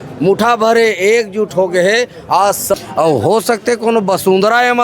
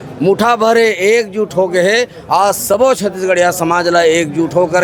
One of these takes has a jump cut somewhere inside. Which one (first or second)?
first